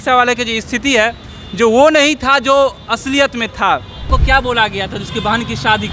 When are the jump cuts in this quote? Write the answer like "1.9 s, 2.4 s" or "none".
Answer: 4.1 s